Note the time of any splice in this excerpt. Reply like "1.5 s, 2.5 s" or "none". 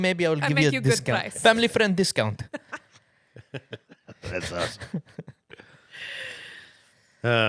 none